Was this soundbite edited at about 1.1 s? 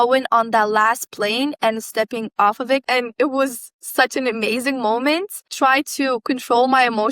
no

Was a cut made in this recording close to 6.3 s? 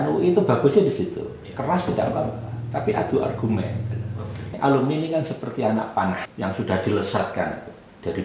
yes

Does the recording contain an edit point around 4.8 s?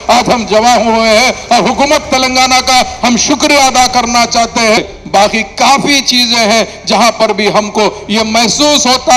yes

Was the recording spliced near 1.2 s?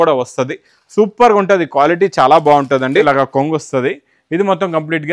no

